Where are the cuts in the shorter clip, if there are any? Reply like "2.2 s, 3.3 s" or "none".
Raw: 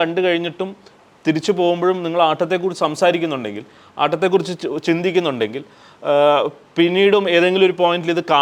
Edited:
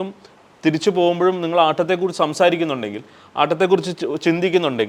none